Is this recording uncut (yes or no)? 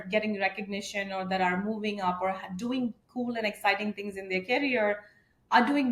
yes